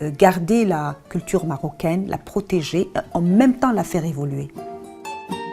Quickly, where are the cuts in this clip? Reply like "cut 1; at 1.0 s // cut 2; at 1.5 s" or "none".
none